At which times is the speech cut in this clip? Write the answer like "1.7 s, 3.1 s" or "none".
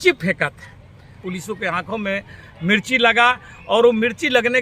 1.2 s